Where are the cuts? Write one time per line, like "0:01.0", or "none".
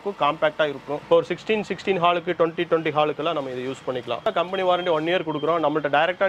0:00.9
0:04.3